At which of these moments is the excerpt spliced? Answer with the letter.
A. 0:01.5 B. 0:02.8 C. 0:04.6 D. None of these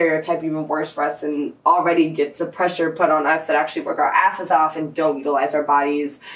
D